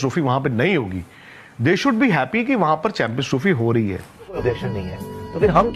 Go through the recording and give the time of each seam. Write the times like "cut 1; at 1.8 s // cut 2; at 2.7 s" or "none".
cut 1; at 4.4 s